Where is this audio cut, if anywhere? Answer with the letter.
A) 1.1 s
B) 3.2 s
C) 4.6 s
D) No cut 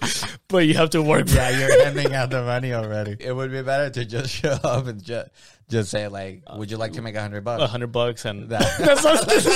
B